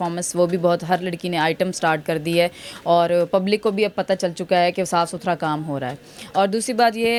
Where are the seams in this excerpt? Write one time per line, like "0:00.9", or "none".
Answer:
none

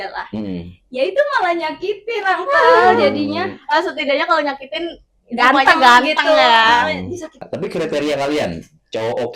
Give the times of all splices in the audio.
0:07.4

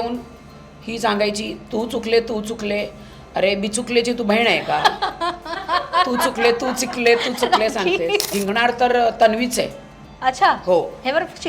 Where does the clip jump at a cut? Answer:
0:08.3

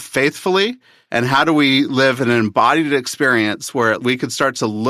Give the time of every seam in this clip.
0:00.9
0:04.0

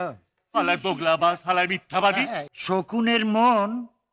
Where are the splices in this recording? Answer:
0:02.5

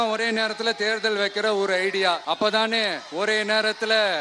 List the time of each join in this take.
0:02.2

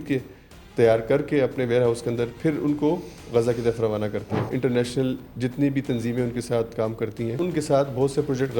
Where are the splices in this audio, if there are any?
0:04.5
0:07.4

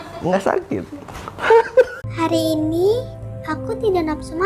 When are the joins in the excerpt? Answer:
none

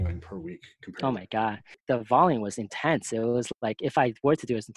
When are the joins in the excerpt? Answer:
0:01.8

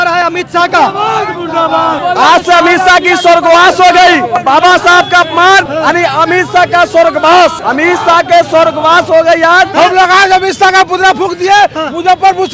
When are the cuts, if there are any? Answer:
0:02.0
0:04.4
0:05.7
0:07.6
0:09.7

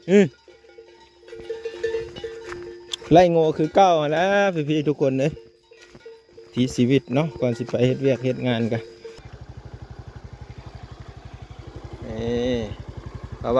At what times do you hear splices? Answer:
0:09.0

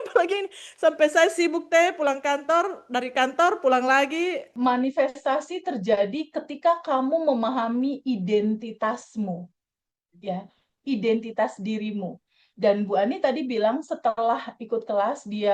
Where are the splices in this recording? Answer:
0:04.5

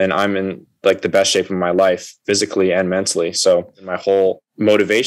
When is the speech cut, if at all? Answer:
0:04.1

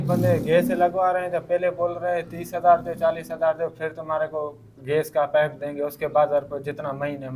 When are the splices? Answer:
none

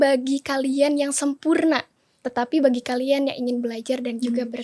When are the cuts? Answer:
none

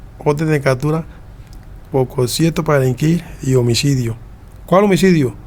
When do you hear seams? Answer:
none

